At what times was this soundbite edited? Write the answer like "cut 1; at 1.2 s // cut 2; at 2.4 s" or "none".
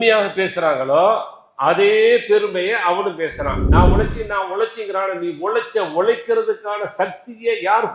cut 1; at 3.6 s